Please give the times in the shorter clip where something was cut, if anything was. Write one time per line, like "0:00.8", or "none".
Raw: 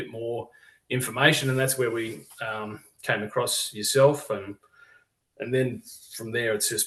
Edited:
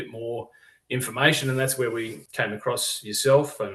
0:02.2